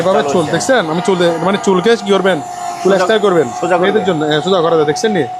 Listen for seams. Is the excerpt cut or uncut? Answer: uncut